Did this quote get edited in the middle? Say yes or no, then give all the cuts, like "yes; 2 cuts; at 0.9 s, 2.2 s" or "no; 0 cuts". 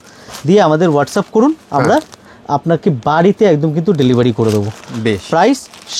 no; 0 cuts